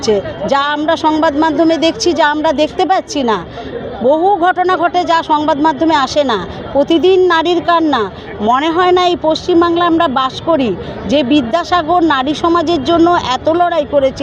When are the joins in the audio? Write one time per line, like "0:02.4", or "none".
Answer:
none